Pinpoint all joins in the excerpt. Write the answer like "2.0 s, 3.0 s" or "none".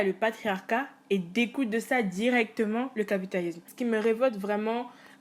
3.7 s